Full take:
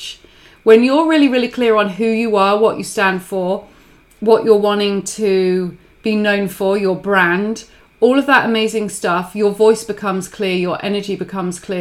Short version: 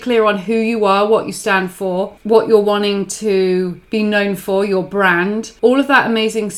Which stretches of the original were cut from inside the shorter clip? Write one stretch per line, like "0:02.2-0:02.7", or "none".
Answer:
0:03.7-0:04.1
0:05.8-0:05.9
0:07.6-0:07.9